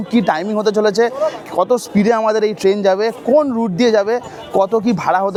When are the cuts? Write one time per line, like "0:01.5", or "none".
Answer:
none

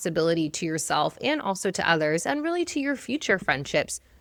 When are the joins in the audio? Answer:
none

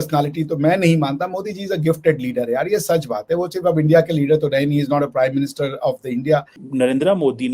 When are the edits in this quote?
0:06.6

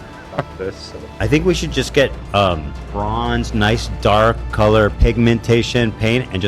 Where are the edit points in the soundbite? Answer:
0:01.1
0:02.8
0:05.0

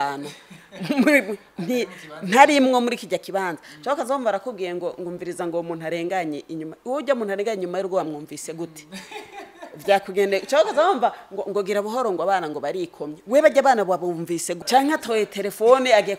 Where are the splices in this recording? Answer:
0:14.5

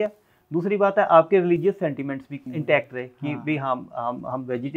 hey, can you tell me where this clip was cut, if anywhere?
0:02.4

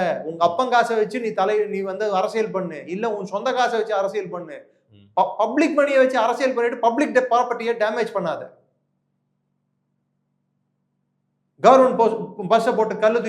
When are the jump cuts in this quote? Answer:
none

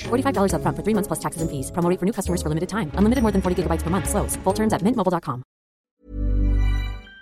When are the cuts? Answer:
0:05.9

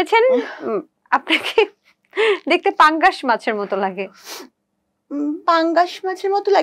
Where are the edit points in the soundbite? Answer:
none

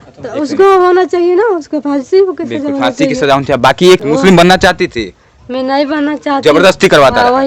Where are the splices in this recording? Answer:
0:04.0

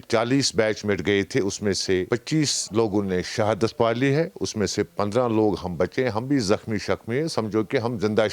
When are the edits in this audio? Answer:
none

